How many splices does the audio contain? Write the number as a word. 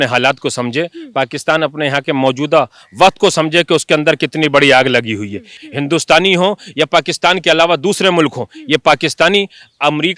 one